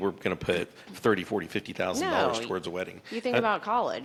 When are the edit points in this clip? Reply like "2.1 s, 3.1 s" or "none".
none